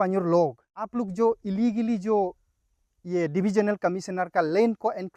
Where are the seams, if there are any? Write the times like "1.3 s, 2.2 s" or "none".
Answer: 0.9 s

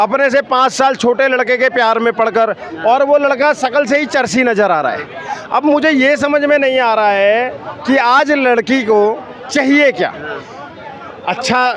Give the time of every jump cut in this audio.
none

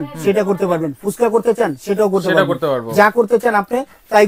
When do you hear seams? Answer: none

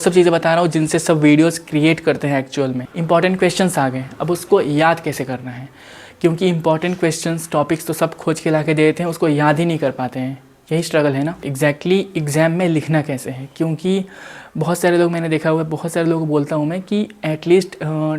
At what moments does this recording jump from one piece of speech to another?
2.9 s, 11.5 s

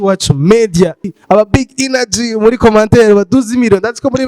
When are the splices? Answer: 1.0 s

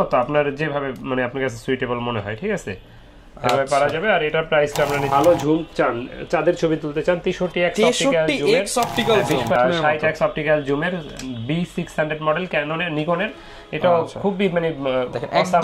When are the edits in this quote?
5.1 s, 9.5 s

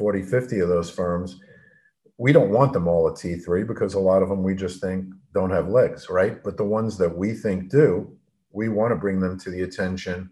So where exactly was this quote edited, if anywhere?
none

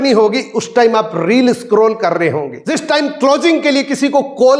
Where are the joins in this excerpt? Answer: none

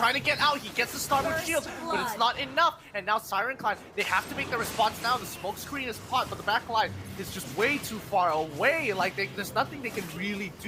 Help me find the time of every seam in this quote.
none

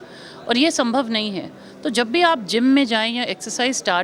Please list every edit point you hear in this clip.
none

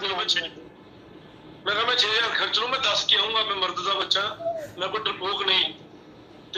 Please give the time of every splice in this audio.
none

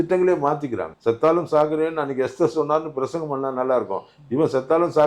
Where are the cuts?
0.9 s

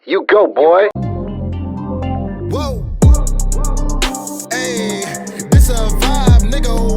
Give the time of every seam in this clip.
0.9 s

